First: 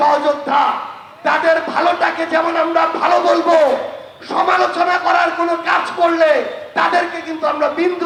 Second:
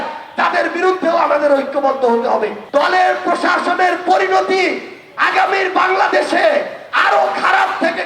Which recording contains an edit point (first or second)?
second